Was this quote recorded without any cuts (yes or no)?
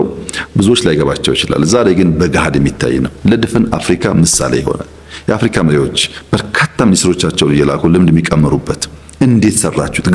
yes